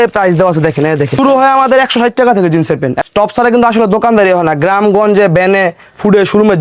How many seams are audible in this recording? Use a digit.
2